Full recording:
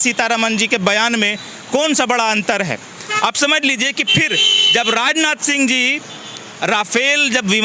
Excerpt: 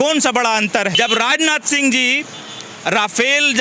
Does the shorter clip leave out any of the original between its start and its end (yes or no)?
yes